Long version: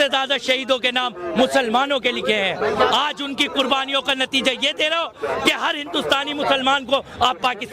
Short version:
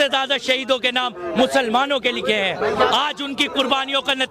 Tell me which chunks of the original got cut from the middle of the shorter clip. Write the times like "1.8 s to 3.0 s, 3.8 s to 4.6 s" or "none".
none